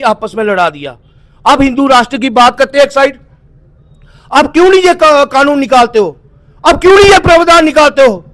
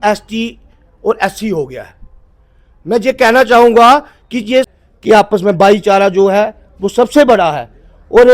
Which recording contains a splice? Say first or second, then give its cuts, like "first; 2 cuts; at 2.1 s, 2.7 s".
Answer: second; 1 cut; at 4.7 s